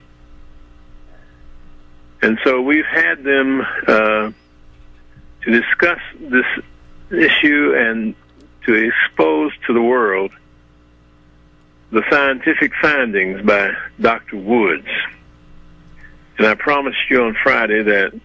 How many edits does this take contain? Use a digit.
0